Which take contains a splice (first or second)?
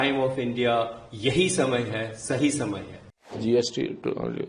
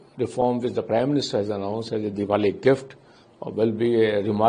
first